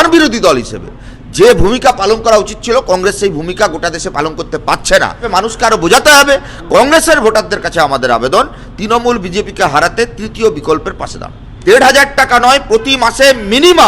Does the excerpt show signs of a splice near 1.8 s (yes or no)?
no